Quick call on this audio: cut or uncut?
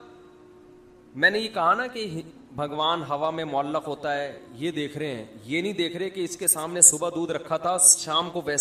uncut